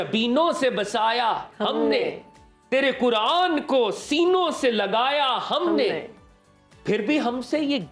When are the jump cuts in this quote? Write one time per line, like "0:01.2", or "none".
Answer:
none